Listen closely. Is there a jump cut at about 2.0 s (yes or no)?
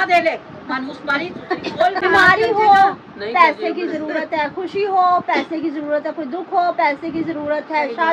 yes